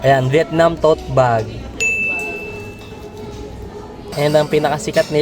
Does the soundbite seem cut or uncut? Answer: cut